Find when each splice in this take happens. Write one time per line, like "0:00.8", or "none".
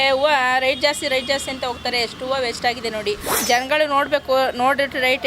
0:03.3